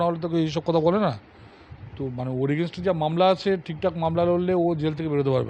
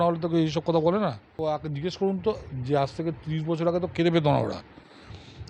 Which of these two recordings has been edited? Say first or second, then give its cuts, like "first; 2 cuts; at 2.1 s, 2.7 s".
second; 1 cut; at 1.4 s